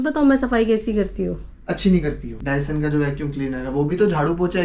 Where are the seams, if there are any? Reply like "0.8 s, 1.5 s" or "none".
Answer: 2.3 s

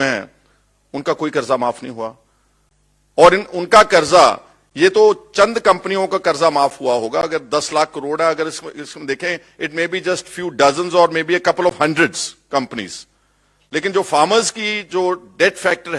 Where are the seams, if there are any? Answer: none

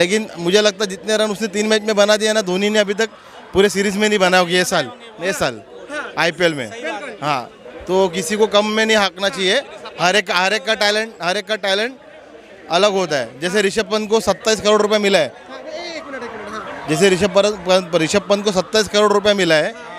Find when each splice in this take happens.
none

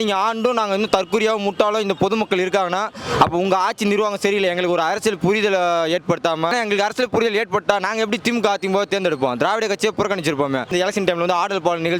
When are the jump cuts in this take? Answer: 6.5 s, 10.7 s

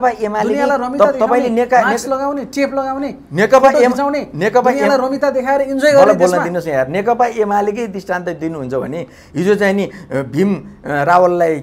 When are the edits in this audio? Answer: none

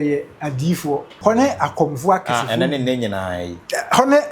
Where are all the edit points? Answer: 1.1 s

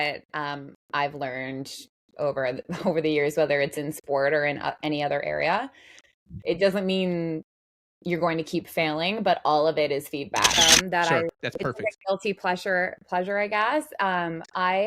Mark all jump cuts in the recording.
10.6 s

